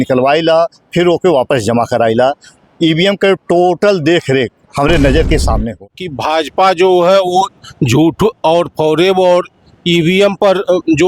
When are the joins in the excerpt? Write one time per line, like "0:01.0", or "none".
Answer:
0:05.8